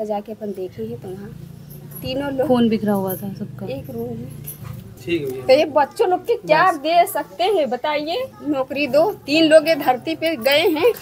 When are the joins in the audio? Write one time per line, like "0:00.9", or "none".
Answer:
0:04.9